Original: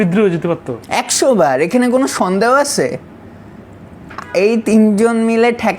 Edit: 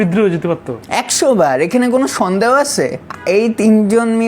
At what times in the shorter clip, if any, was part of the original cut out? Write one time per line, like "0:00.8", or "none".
0:03.1